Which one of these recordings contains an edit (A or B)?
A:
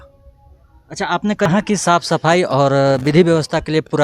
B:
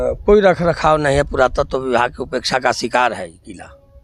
A